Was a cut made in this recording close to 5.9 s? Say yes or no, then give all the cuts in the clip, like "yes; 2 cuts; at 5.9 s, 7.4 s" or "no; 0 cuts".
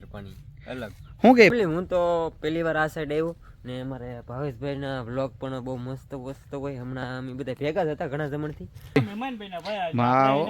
no; 2 cuts; at 1.5 s, 9.0 s